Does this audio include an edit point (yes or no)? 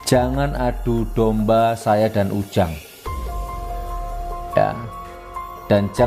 yes